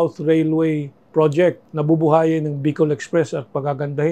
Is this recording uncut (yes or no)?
no